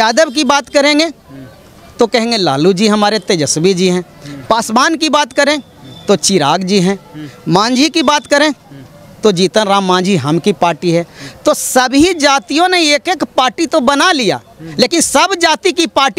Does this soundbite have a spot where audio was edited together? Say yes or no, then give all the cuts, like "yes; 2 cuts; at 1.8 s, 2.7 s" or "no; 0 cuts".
no; 0 cuts